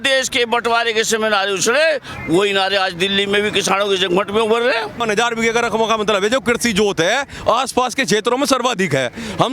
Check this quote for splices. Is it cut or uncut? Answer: cut